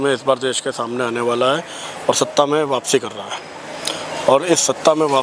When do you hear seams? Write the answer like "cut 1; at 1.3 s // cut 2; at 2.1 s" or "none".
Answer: none